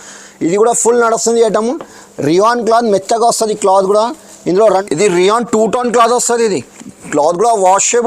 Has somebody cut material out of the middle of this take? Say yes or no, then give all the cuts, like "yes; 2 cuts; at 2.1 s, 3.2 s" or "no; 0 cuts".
yes; 1 cut; at 4.8 s